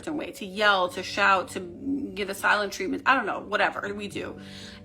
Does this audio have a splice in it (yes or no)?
no